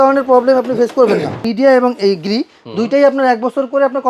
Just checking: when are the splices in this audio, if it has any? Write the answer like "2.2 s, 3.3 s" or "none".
1.4 s